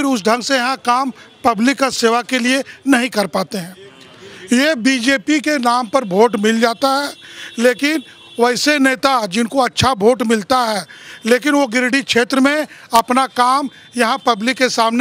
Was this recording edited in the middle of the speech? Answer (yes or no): no